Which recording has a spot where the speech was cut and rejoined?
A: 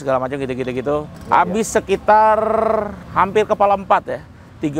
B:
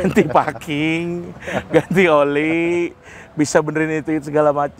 A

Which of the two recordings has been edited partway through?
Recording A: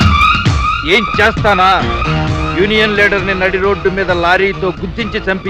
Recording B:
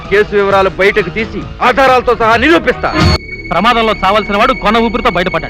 B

